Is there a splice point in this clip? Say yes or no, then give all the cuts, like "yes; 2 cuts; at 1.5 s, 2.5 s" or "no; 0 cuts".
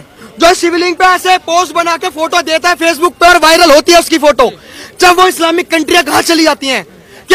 no; 0 cuts